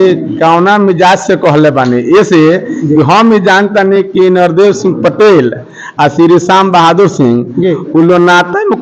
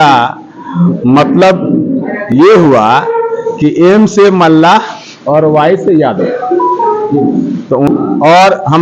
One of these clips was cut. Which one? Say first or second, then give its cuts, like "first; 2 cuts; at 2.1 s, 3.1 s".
second; 1 cut; at 7.9 s